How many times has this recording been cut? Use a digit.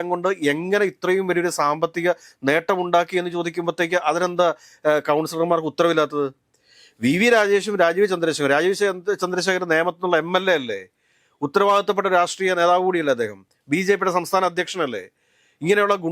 0